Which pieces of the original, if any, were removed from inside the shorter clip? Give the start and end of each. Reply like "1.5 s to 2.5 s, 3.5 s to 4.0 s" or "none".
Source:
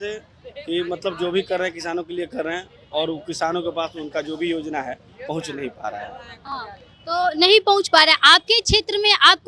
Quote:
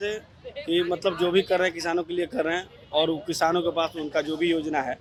none